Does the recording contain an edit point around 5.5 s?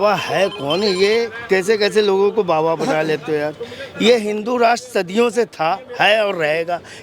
no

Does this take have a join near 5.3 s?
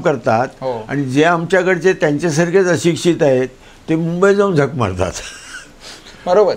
no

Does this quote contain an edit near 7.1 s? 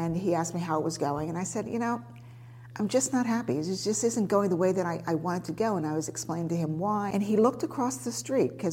yes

